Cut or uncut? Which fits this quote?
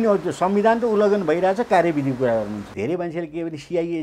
cut